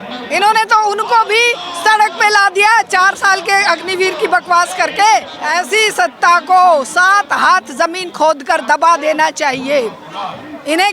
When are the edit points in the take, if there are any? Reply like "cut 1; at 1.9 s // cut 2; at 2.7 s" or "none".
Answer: cut 1; at 5.4 s